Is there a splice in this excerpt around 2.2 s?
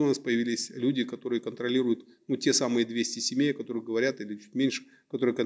no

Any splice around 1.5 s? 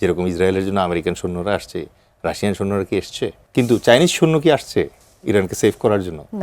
no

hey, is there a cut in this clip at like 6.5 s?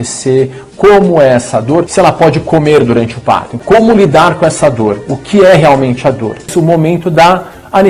yes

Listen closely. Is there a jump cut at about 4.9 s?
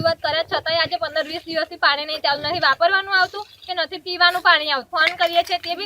yes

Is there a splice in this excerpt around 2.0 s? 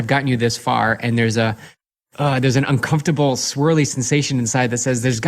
yes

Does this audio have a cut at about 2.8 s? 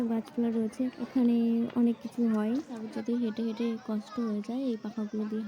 yes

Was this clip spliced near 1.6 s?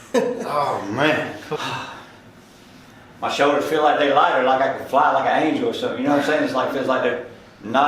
yes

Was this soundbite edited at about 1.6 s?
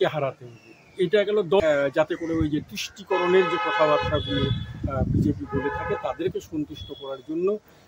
yes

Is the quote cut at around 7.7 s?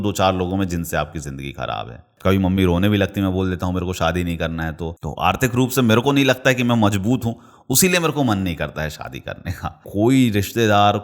no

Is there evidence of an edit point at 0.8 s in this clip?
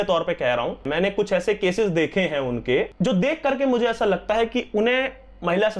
yes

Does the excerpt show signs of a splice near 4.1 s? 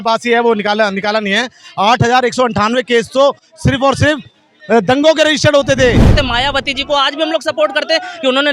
no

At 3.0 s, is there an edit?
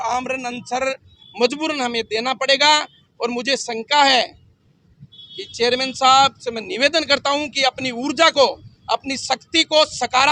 no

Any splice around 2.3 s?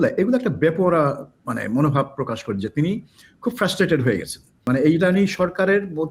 no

